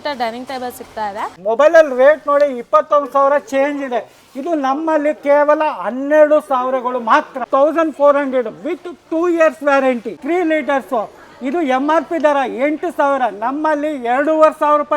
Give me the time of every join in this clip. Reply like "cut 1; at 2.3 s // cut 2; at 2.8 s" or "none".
cut 1; at 1.3 s // cut 2; at 7.4 s // cut 3; at 10.1 s

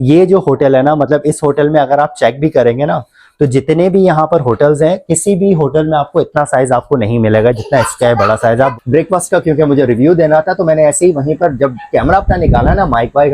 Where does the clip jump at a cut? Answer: cut 1; at 8.8 s

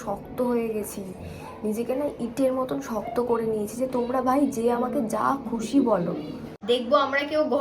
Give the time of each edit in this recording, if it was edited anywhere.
cut 1; at 6.5 s

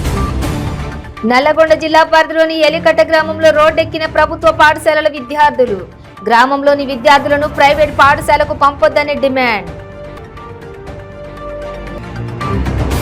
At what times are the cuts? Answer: cut 1; at 1.1 s

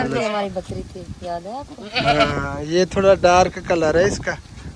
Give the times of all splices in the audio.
none

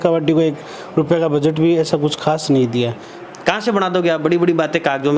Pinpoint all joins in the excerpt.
cut 1; at 3.1 s

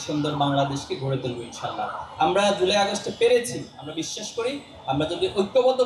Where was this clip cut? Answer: none

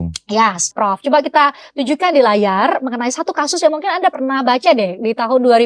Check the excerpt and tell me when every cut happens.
cut 1; at 1.0 s

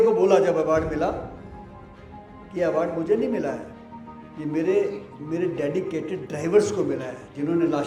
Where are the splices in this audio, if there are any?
none

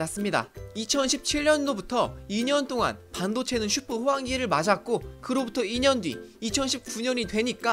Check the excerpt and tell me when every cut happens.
none

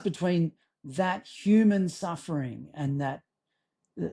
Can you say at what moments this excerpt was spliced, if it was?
none

